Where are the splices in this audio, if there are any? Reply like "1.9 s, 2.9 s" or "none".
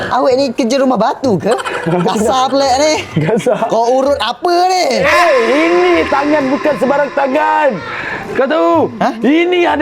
none